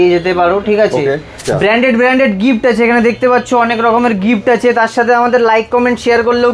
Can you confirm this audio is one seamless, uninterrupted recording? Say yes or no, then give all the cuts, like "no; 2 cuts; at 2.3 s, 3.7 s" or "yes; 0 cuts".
no; 1 cut; at 1.4 s